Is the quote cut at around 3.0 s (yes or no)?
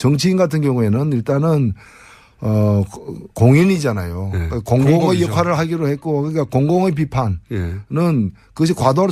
no